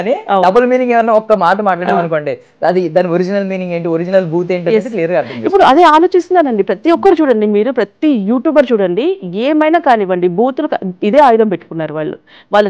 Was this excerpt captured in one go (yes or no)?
yes